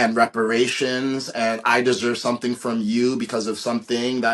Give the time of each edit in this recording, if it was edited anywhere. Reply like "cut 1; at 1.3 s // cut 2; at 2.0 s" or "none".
none